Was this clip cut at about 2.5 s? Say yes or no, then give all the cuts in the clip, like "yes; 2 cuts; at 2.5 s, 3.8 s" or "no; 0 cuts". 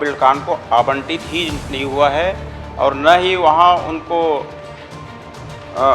no; 0 cuts